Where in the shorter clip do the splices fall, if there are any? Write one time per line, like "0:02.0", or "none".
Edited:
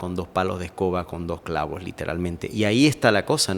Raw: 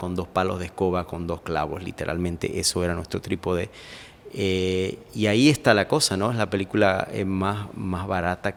0:02.4